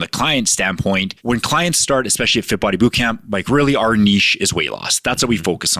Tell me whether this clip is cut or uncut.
cut